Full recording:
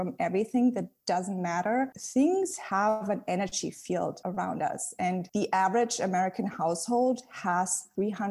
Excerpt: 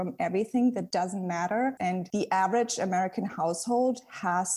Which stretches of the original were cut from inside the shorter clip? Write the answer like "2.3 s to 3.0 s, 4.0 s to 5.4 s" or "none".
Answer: 0.9 s to 1.0 s, 2.1 s to 5.1 s